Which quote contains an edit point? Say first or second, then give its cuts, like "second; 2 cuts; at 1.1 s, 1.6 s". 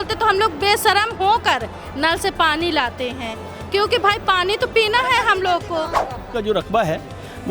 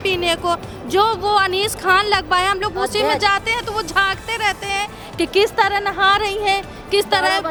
first; 1 cut; at 6.3 s